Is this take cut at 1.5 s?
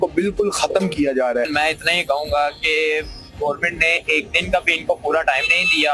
yes; 1 cut; at 1.5 s

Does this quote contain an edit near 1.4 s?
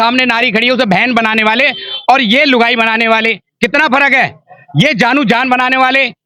no; 0 cuts

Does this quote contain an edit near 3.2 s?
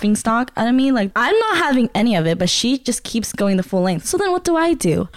no; 1 cut; at 1.1 s

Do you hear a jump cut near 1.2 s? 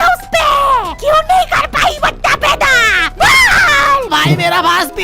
no; 1 cut; at 4.1 s

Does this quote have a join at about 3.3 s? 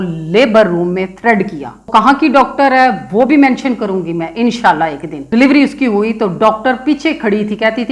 no; 2 cuts; at 1.9 s, 5.1 s

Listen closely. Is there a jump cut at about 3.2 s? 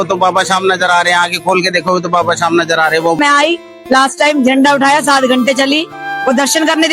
yes; 1 cut; at 3.2 s

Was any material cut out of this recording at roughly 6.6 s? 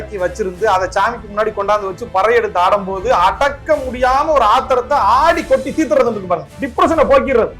yes; 1 cut; at 6.6 s

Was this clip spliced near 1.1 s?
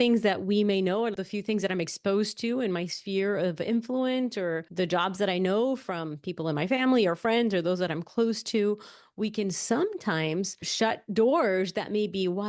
yes; 3 cuts; at 1.1 s, 4.6 s, 10.7 s

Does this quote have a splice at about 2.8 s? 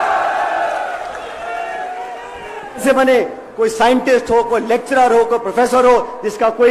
yes; 1 cut; at 2.8 s

